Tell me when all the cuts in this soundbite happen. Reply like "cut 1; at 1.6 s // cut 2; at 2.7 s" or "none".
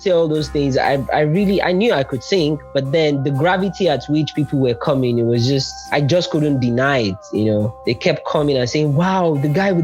cut 1; at 2.6 s // cut 2; at 5.9 s // cut 3; at 7.8 s